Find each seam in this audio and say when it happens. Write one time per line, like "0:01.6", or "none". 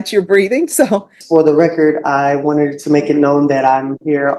0:01.2